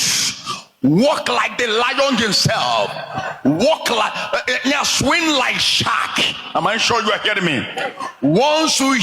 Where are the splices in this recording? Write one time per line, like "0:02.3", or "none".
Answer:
none